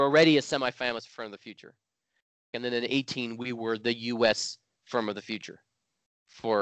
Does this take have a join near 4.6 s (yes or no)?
no